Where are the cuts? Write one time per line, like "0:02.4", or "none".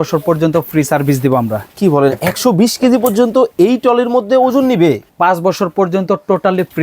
0:05.1

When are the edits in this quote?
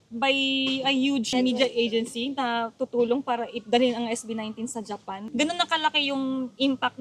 0:01.3
0:05.2

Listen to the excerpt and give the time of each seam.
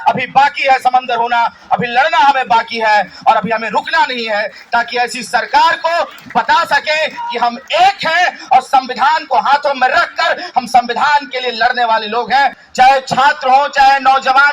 0:12.6

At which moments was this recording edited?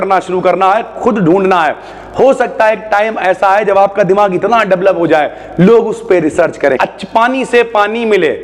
0:06.8

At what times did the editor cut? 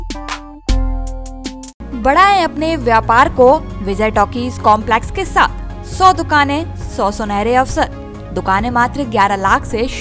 none

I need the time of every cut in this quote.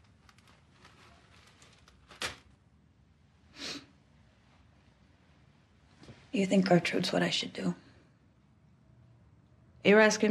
none

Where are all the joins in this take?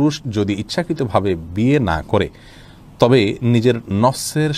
none

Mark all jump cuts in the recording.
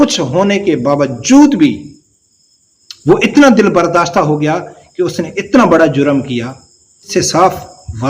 0:07.1

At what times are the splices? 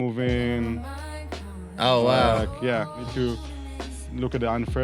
0:03.1

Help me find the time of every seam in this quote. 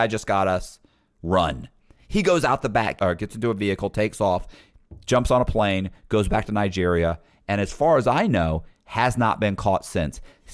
0:02.9

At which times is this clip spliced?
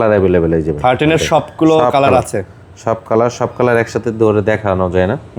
none

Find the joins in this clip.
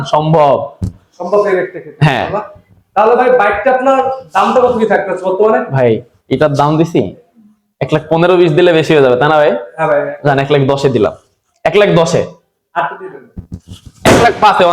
none

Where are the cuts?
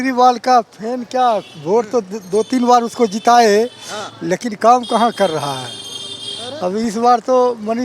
none

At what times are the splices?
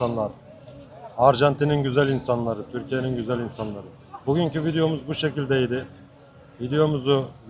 none

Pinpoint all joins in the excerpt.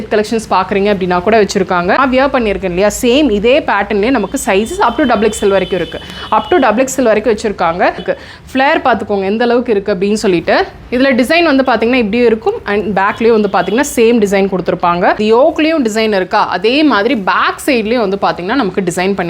0:02.0
0:08.0
0:15.2

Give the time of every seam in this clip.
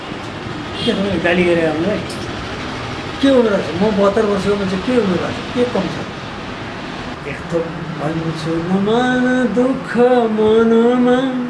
0:07.1

